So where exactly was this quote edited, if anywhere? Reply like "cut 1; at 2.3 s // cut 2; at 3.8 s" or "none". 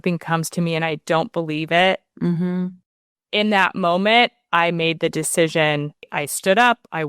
cut 1; at 2.8 s // cut 2; at 6.1 s